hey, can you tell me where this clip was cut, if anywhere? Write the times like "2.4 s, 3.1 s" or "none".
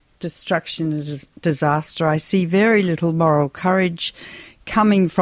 2.8 s